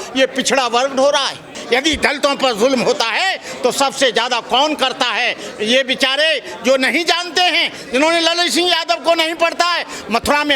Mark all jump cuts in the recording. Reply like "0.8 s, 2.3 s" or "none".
1.5 s